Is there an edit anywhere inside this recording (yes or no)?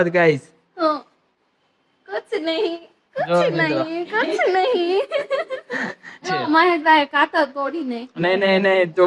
yes